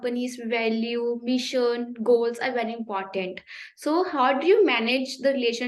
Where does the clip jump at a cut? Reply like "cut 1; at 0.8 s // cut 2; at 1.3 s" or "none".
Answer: none